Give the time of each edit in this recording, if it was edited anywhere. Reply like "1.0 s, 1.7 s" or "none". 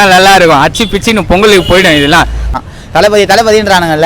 2.5 s